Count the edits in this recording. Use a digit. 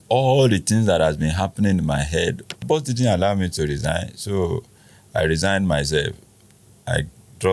1